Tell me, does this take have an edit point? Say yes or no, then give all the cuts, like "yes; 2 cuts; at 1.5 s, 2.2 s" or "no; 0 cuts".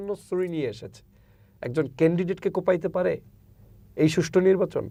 no; 0 cuts